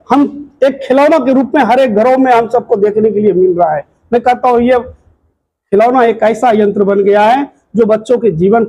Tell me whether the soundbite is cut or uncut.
uncut